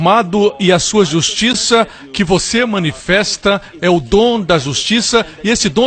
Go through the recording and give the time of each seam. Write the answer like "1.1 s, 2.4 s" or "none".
1.7 s